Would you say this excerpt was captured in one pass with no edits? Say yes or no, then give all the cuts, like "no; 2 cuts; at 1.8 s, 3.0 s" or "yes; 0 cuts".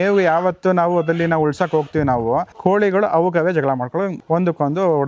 no; 2 cuts; at 2.5 s, 4.2 s